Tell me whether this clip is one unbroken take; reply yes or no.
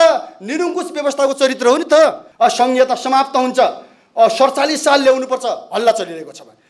no